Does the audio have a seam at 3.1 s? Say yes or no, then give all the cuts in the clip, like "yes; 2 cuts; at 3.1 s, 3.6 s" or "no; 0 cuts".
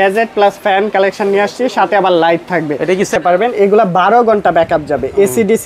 yes; 1 cut; at 3.1 s